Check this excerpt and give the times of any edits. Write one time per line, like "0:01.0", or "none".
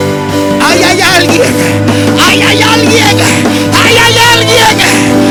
none

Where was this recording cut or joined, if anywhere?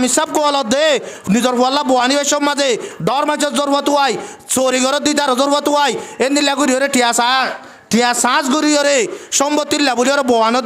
none

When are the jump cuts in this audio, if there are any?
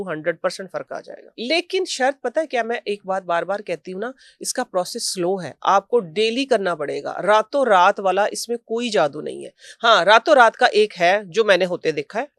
none

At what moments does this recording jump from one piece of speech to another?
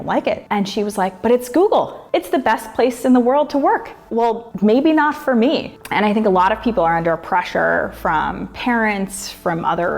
0:04.0
0:05.7

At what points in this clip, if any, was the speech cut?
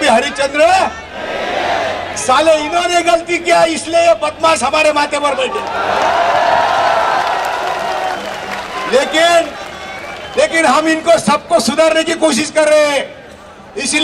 none

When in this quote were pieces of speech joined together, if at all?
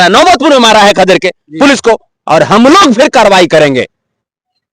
0:02.1

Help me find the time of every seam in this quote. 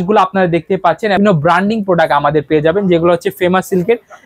0:01.2

